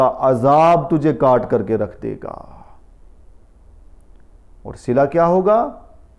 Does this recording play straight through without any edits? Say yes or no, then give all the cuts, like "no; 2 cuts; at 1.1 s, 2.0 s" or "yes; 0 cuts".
yes; 0 cuts